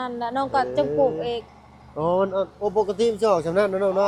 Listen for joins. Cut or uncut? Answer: uncut